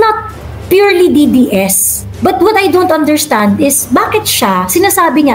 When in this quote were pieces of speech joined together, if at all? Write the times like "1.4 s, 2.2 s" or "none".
none